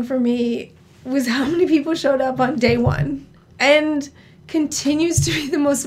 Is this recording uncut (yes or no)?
no